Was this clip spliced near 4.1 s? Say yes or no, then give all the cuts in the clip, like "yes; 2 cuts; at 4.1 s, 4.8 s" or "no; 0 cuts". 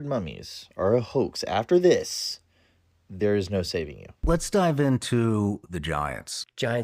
yes; 1 cut; at 4.1 s